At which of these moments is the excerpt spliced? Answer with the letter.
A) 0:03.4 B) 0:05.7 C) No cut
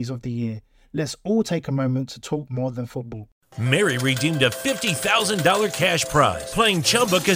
A